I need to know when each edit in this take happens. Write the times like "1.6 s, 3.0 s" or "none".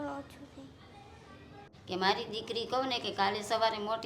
1.7 s